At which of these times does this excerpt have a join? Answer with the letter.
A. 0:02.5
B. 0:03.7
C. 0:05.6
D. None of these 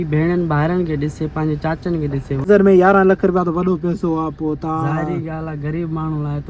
A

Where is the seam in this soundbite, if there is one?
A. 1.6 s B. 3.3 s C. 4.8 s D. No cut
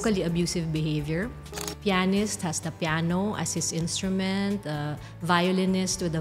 A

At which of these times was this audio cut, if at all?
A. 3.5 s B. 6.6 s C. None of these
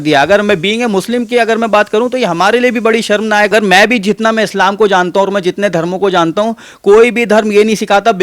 A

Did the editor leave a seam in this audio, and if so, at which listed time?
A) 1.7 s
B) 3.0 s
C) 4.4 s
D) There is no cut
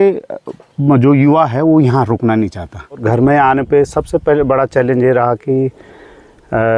B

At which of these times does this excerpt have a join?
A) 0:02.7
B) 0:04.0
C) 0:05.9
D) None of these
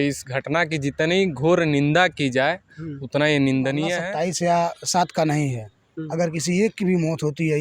B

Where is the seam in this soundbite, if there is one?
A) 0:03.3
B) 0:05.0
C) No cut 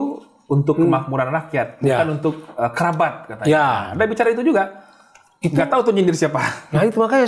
C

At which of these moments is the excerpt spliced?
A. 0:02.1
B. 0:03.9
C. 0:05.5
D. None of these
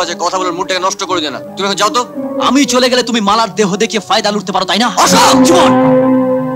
D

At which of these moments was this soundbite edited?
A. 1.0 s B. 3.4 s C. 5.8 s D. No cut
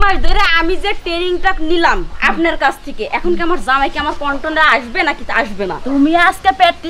D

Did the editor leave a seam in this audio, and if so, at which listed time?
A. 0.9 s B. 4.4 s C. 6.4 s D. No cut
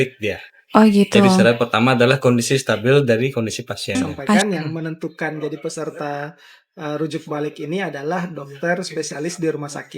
B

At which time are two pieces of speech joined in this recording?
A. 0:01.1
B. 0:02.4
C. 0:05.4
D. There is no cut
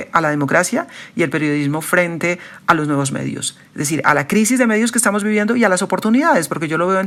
D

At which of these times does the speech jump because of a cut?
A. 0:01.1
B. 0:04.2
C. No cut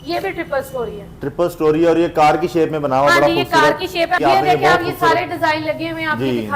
B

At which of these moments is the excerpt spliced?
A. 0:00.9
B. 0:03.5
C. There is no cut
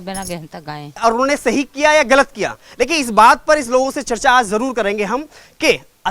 A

